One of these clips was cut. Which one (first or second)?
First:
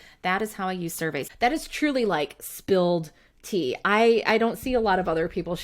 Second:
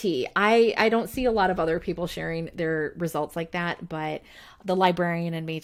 first